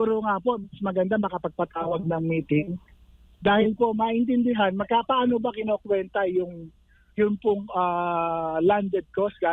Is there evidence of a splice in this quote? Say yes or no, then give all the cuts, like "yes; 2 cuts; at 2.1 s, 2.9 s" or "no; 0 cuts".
no; 0 cuts